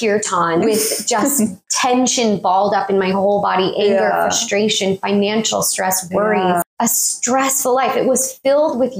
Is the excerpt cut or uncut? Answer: cut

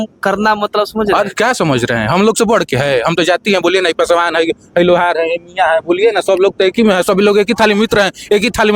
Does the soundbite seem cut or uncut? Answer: uncut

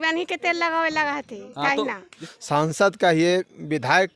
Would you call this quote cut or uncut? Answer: cut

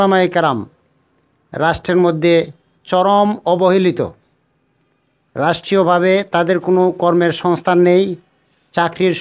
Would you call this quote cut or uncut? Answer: uncut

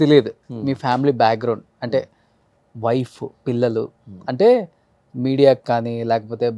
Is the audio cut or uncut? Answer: uncut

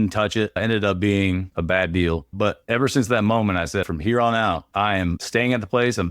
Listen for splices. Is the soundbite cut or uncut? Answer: cut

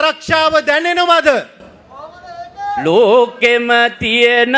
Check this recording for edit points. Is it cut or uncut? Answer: cut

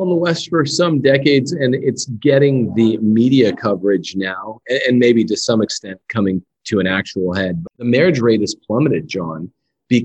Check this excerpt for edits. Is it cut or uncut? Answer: cut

